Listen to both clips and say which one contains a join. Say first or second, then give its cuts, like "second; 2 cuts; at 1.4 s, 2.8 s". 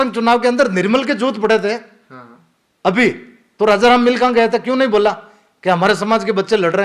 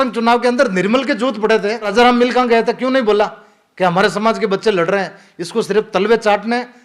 second; 1 cut; at 1.9 s